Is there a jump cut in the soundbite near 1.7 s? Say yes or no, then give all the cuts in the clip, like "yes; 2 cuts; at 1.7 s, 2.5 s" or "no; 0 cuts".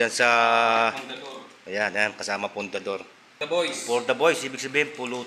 no; 1 cut; at 3.4 s